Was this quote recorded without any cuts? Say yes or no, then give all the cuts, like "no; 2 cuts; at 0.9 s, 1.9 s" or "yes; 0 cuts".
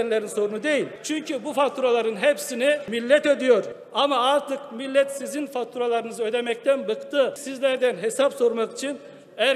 no; 4 cuts; at 1.0 s, 2.9 s, 3.8 s, 7.5 s